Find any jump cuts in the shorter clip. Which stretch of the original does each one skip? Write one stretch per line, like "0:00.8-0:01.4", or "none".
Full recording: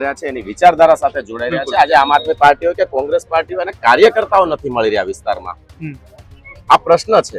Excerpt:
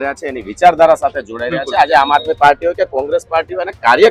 none